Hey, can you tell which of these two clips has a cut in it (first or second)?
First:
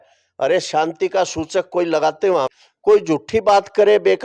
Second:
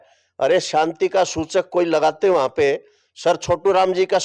first